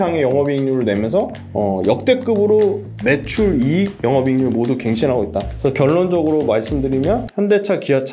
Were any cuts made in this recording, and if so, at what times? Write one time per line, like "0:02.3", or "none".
0:01.4
0:02.9
0:03.9
0:05.5
0:07.3